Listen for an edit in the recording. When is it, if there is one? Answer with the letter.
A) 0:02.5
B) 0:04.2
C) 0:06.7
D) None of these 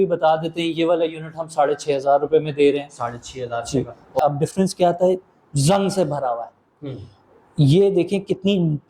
B